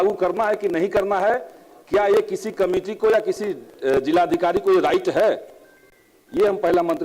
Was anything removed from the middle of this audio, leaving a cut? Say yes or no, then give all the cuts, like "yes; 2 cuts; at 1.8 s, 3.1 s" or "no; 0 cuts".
no; 0 cuts